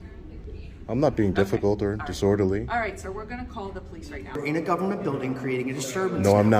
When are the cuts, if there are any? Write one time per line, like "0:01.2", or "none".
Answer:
0:04.4